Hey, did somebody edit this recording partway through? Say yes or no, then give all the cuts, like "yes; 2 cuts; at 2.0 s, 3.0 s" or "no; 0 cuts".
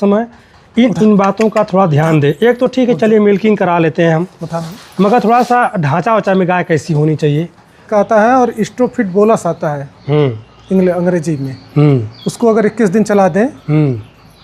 yes; 1 cut; at 7.9 s